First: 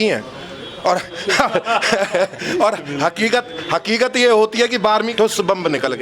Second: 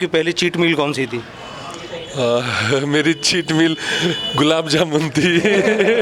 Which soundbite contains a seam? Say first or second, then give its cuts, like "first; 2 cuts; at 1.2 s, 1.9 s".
first; 1 cut; at 5.1 s